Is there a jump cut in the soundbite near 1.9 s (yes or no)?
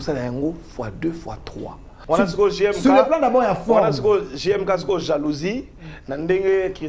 yes